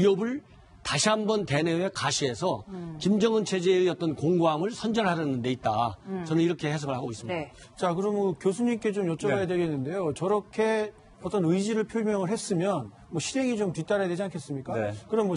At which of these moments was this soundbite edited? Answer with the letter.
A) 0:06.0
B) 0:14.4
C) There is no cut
C